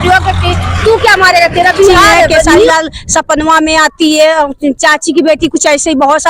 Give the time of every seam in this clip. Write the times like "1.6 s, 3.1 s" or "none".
2.7 s